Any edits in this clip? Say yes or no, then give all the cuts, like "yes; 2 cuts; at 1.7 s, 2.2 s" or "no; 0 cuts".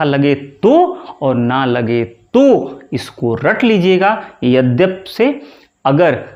no; 0 cuts